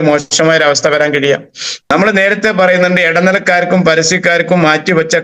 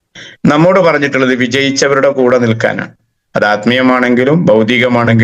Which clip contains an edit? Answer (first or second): first